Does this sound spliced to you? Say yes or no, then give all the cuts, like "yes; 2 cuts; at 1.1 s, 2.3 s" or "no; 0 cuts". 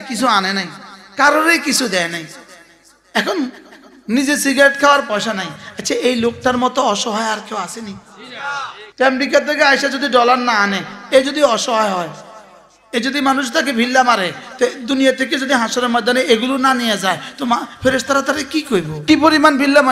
yes; 2 cuts; at 8.8 s, 18.9 s